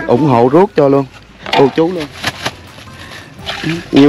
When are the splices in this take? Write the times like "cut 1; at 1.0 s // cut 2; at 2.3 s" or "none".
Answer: cut 1; at 2.0 s